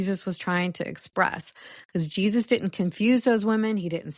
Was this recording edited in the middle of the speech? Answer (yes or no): no